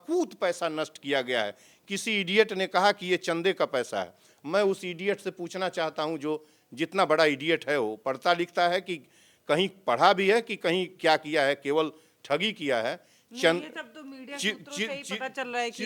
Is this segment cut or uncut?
uncut